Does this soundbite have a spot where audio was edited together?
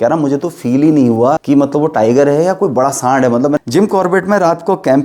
yes; 2 cuts; at 1.4 s, 3.6 s

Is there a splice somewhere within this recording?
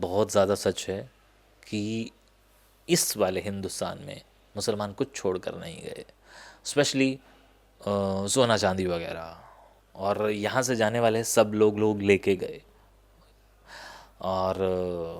no; 0 cuts

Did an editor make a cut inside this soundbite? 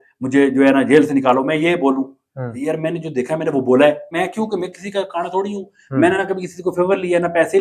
yes; 1 cut; at 4.1 s

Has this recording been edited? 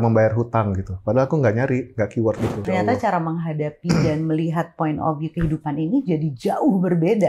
yes; 1 cut; at 2.6 s

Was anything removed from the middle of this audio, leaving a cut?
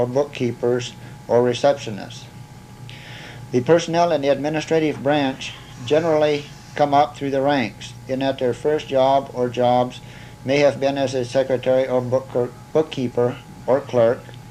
no; 0 cuts

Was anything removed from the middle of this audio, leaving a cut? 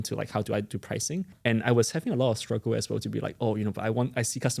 yes; 1 cut; at 1.3 s

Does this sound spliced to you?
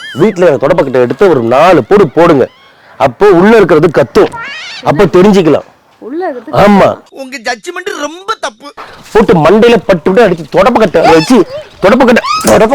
yes; 1 cut; at 8.9 s

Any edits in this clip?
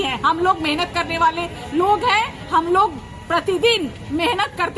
no; 0 cuts

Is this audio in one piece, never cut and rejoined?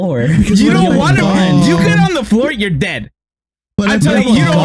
yes; 0 cuts

